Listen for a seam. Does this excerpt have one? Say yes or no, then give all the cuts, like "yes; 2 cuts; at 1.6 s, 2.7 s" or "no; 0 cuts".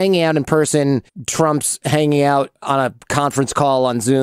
yes; 2 cuts; at 1.2 s, 2.6 s